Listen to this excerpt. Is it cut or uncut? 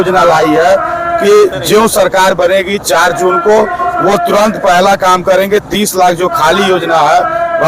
uncut